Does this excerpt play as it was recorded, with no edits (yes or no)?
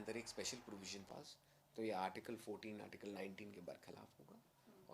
no